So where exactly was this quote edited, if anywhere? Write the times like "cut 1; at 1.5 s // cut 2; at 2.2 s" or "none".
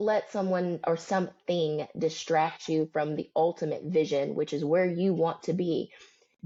none